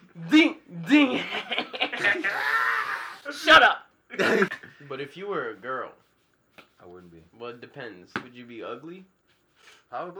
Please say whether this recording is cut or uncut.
cut